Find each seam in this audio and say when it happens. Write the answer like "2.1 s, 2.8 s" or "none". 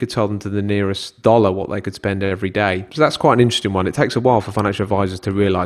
1.1 s, 2.9 s